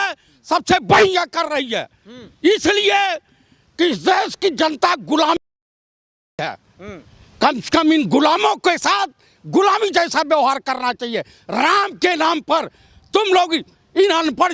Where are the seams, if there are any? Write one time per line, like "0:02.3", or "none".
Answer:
none